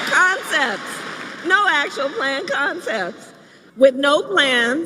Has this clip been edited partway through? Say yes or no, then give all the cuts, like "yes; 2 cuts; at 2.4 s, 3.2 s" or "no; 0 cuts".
yes; 1 cut; at 3.6 s